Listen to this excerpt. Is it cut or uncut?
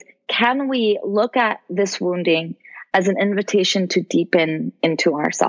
uncut